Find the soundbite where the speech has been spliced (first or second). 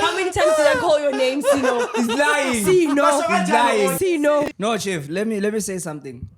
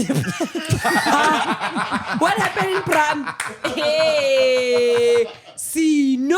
first